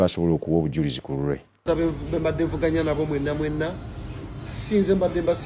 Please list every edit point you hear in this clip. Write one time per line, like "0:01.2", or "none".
0:01.6